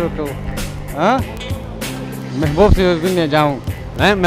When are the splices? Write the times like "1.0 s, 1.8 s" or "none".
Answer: none